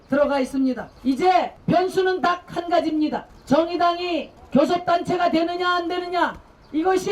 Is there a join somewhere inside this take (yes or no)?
yes